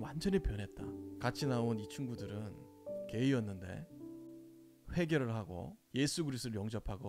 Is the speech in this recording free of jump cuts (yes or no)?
no